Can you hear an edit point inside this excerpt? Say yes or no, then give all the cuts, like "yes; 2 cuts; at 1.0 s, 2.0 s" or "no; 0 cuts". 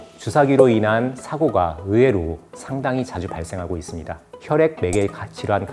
yes; 1 cut; at 4.2 s